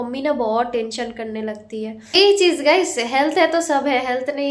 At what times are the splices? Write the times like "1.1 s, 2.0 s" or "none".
2.1 s